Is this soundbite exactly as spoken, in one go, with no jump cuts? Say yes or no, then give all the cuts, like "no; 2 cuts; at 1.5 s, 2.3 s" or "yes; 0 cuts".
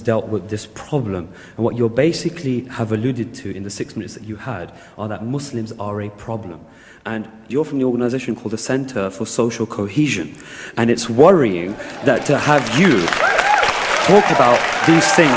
yes; 0 cuts